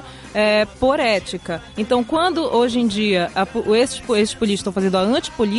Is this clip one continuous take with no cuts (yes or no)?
yes